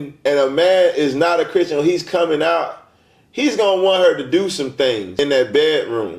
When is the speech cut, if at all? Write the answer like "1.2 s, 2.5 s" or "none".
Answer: 5.1 s